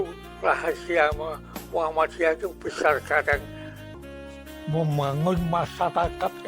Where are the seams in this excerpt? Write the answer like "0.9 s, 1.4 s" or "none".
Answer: 3.9 s